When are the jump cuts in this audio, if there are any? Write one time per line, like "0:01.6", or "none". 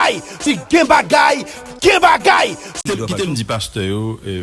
0:02.8